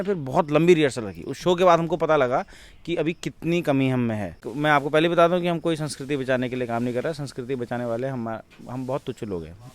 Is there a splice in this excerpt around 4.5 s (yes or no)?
yes